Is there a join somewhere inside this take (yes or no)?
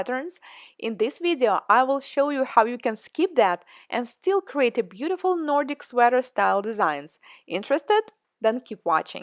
no